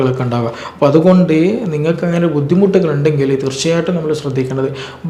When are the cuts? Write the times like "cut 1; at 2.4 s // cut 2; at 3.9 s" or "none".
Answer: none